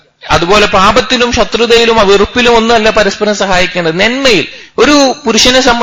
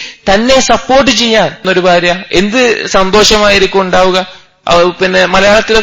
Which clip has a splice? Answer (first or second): second